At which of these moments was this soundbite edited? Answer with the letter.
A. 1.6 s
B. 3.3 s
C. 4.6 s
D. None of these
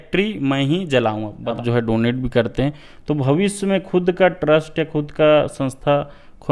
A